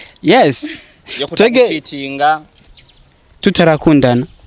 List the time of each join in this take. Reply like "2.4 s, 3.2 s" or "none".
2.6 s